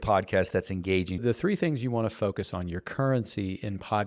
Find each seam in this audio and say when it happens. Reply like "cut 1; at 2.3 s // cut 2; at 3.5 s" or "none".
cut 1; at 1.2 s

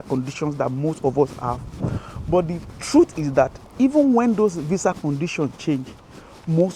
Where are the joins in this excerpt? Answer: none

